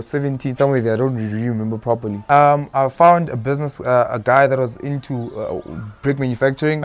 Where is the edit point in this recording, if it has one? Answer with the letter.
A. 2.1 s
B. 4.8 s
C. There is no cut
A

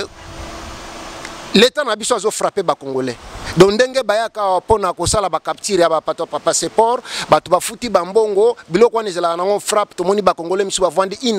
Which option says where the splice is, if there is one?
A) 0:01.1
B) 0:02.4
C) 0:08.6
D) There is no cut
D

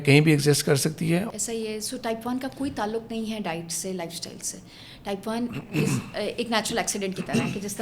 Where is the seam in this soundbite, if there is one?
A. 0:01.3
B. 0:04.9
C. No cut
A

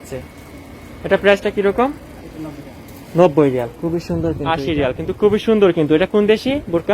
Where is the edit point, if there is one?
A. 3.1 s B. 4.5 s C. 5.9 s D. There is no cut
B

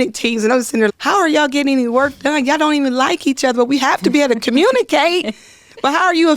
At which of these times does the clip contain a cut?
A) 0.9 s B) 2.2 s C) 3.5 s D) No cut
A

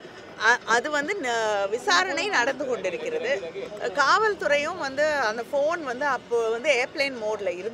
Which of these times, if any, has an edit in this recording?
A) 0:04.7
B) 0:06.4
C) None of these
C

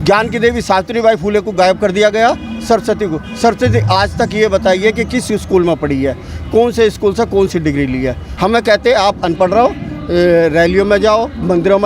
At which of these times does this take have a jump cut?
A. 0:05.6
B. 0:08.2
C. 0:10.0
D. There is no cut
B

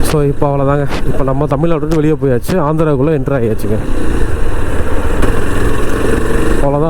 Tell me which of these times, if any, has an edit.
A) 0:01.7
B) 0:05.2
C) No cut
B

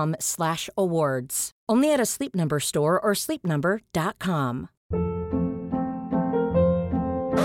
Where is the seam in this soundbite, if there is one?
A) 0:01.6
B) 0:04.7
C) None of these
B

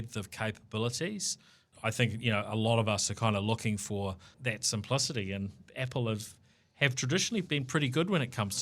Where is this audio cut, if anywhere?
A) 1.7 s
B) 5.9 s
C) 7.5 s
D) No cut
A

